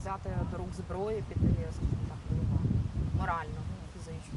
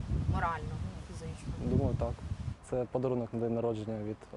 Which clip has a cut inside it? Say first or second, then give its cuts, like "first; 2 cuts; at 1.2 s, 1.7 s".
second; 1 cut; at 2.5 s